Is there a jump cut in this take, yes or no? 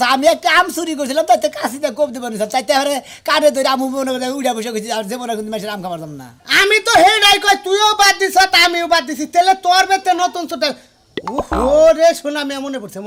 no